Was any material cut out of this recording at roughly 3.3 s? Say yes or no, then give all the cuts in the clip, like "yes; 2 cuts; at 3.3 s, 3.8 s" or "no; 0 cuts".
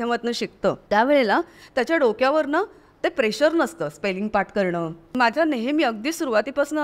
no; 2 cuts; at 0.8 s, 5.0 s